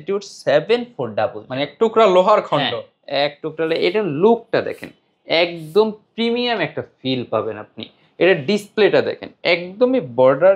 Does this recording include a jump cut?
no; 0 cuts

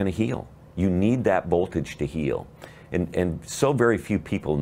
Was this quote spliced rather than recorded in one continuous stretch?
no; 0 cuts

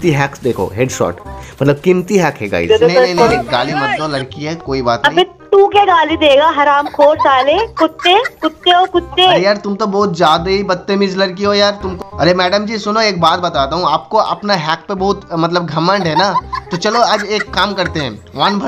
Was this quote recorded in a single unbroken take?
no; 2 cuts; at 2.7 s, 11.9 s

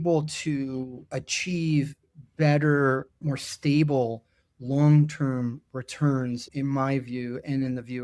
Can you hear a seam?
yes; 3 cuts; at 1.0 s, 3.2 s, 6.5 s

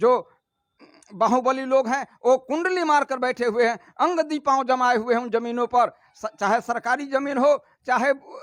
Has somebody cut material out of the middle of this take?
no; 0 cuts

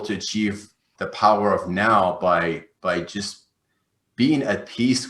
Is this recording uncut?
no; 1 cut; at 0.9 s

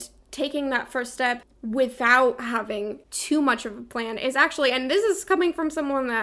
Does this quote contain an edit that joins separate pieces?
yes; 2 cuts; at 1.5 s, 3.1 s

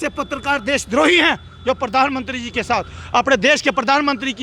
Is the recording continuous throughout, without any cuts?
yes; 0 cuts

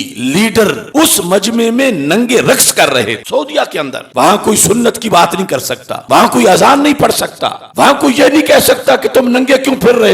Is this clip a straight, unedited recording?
no; 1 cut; at 3.2 s

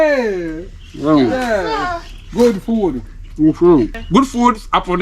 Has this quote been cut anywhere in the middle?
yes; 1 cut; at 4.0 s

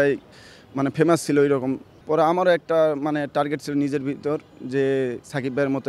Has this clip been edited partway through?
yes; 1 cut; at 1.9 s

